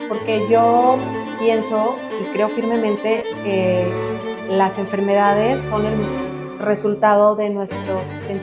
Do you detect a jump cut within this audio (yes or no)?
no